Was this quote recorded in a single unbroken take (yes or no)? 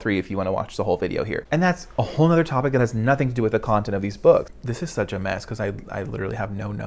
no